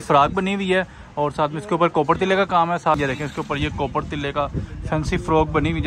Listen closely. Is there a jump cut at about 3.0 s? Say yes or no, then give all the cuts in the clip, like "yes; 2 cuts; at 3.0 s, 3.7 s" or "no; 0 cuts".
yes; 1 cut; at 3.0 s